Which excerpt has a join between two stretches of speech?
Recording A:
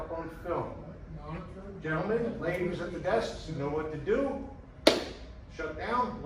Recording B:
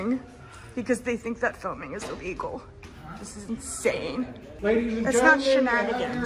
B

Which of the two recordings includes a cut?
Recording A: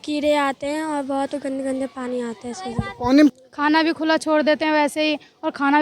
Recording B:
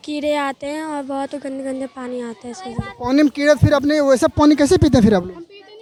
A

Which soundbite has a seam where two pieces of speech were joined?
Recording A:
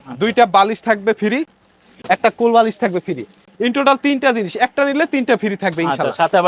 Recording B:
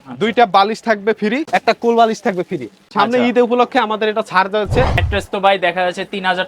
B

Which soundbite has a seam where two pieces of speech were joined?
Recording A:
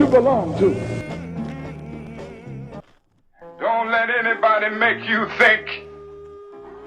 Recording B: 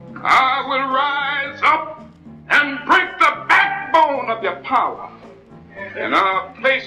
A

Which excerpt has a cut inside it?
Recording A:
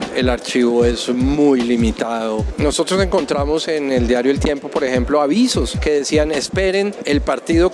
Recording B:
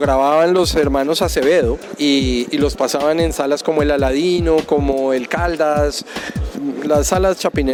A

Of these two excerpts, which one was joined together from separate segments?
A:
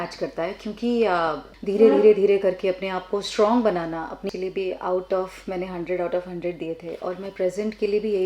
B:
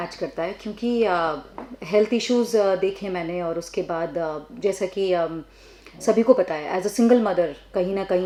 A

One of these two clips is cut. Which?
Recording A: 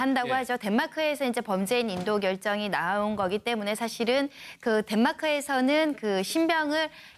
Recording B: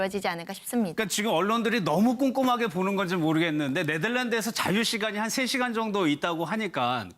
B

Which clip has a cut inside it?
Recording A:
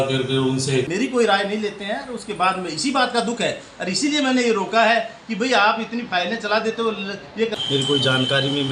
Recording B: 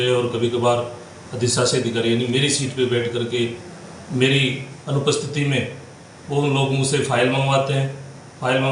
A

